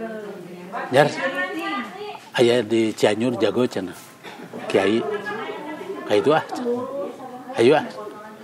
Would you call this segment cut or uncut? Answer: uncut